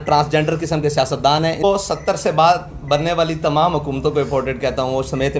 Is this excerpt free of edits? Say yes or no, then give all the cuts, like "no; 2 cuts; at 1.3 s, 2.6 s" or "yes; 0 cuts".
no; 1 cut; at 1.6 s